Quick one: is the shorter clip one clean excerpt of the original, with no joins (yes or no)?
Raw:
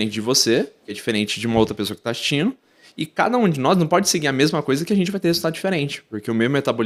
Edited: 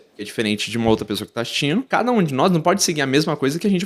no